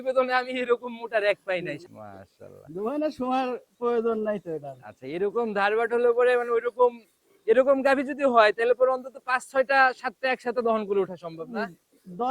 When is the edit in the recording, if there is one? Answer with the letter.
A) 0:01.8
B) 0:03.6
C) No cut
A